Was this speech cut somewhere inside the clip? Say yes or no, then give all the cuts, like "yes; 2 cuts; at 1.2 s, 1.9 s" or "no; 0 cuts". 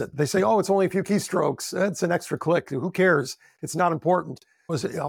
no; 0 cuts